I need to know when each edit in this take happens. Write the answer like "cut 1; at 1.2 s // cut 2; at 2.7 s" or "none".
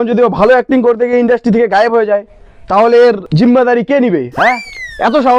cut 1; at 3.3 s